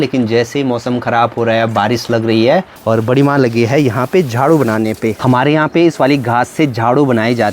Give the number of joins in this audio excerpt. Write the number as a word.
two